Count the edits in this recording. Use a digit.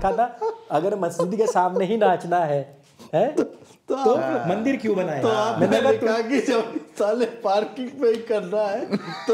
0